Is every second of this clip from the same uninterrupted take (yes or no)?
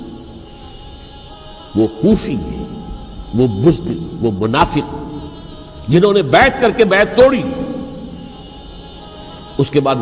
no